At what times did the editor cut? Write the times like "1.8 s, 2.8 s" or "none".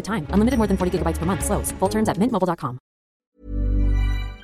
3.2 s